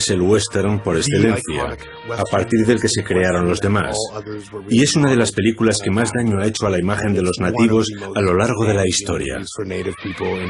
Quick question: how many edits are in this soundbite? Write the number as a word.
zero